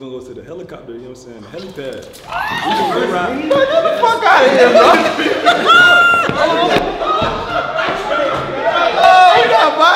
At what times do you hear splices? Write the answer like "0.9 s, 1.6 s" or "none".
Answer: none